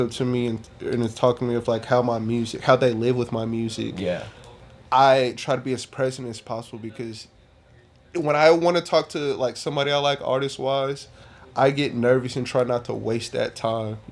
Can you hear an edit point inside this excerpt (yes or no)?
no